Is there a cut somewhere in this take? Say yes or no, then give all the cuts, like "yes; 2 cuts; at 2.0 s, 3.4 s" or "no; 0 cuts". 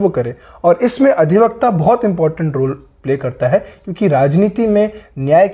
no; 0 cuts